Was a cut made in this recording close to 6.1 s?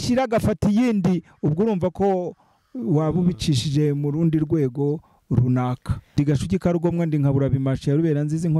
yes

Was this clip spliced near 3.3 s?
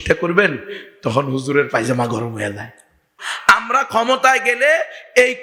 yes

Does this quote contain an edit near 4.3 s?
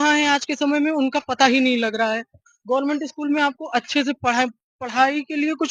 no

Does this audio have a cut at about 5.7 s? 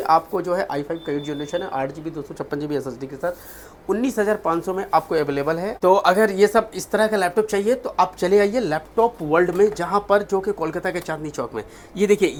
no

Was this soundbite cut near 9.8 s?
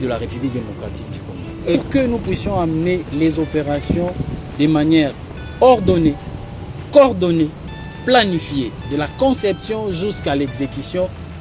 no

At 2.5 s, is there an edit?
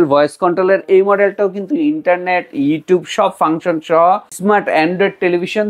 no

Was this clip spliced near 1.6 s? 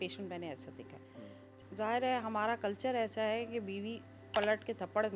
yes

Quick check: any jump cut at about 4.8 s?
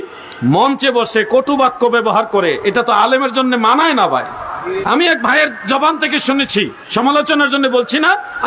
yes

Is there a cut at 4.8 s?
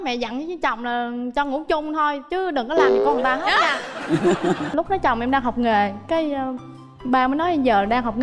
yes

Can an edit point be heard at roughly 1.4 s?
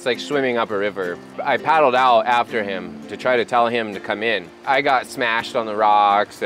yes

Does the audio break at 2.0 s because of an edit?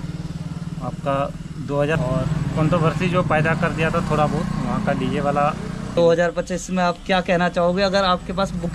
yes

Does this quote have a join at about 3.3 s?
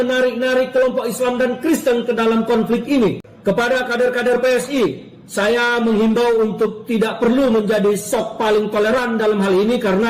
yes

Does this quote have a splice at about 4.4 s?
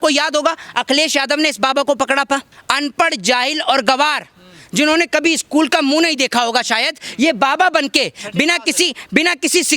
no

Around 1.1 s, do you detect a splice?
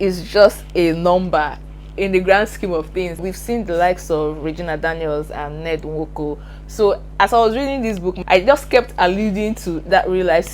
no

